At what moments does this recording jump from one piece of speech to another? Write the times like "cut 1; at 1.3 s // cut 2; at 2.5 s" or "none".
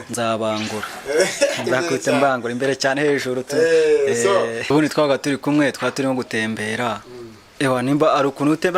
cut 1; at 4.7 s